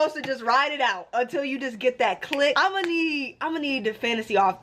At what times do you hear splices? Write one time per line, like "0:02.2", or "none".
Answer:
0:02.6

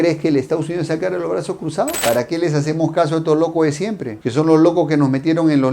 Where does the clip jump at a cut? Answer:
0:02.0

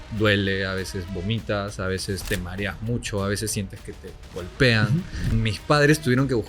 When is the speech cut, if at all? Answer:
0:05.3

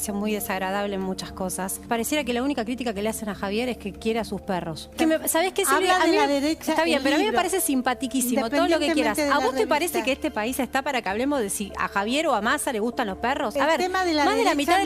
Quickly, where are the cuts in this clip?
0:01.8
0:04.9
0:13.5

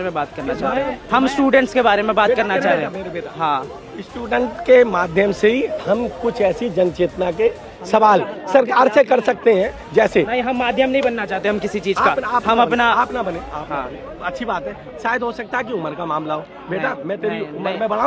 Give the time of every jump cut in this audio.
none

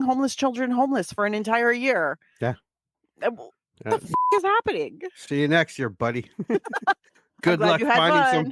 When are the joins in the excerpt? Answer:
none

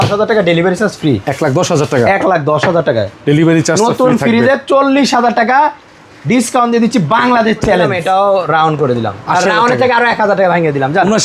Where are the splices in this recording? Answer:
0:07.9

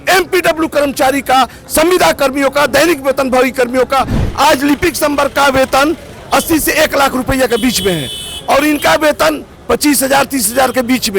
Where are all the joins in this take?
0:04.2

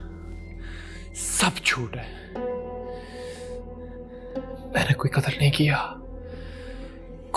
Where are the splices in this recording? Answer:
none

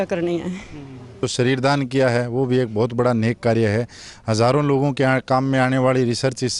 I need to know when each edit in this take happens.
0:01.2

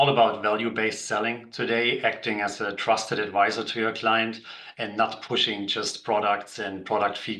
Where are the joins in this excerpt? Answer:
none

